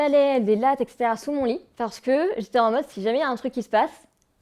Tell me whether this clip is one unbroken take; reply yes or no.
no